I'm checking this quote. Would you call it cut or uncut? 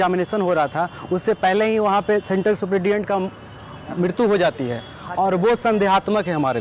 uncut